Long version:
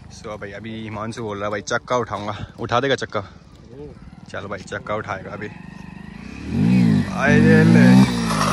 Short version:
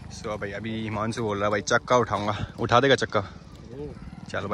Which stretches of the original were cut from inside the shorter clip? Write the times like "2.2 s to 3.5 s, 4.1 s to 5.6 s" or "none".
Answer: none